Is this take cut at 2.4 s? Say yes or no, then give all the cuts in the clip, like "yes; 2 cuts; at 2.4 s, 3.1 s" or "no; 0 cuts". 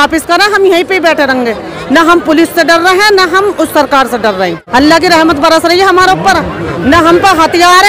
no; 1 cut; at 4.6 s